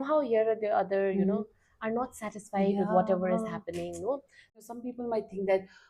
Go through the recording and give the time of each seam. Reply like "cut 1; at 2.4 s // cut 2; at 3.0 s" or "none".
cut 1; at 4.6 s